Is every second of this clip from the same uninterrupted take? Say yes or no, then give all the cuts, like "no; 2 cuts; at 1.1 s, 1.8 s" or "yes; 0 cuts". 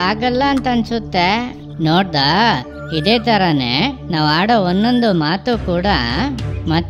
no; 1 cut; at 1.6 s